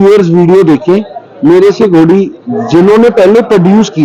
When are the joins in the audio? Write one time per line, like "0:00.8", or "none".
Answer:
none